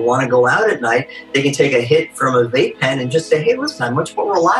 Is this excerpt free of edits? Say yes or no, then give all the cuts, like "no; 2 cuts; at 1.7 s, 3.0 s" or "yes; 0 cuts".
yes; 0 cuts